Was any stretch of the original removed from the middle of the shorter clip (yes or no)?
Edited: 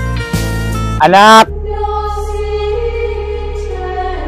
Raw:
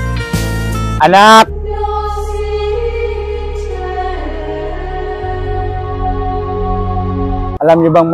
no